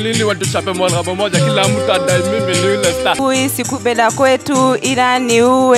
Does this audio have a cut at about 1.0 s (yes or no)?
no